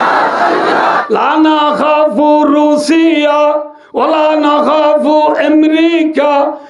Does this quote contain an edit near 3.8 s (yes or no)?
no